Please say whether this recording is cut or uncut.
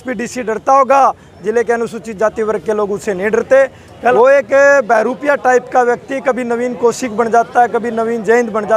cut